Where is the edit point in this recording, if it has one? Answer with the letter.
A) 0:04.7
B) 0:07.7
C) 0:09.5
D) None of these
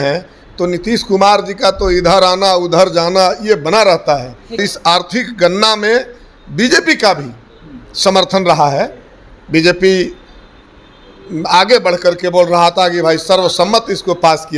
A